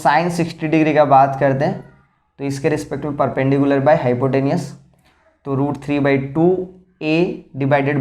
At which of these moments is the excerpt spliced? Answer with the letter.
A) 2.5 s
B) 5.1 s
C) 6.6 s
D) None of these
D